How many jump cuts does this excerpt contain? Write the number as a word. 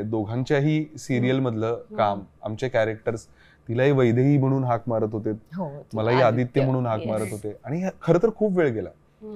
zero